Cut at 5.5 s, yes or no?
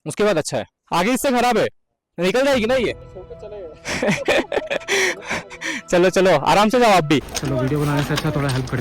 no